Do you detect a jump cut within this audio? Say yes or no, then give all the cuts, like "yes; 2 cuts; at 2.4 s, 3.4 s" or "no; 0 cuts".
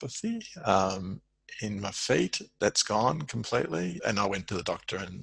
yes; 1 cut; at 4.0 s